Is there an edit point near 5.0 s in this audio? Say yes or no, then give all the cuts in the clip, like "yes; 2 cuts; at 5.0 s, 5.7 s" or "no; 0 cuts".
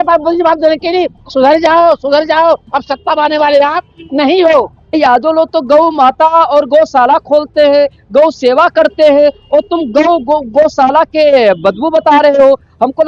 yes; 1 cut; at 5.0 s